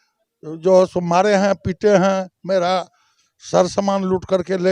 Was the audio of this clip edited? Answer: no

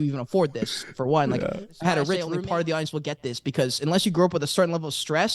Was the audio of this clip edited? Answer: yes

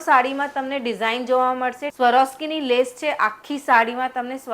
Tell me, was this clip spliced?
yes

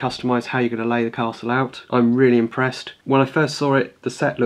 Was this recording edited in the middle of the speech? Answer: yes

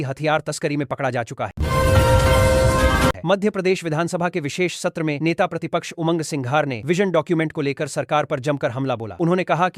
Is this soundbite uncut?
no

